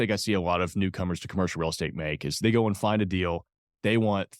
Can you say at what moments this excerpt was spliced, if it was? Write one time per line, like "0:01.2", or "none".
0:02.4